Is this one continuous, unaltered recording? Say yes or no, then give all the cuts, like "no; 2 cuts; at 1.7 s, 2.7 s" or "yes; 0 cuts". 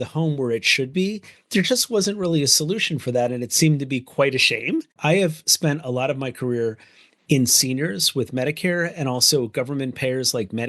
no; 1 cut; at 4.9 s